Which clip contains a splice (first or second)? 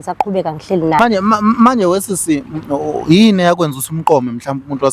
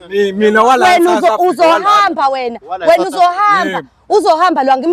first